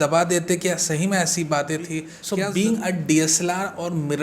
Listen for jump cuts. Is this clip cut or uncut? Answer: cut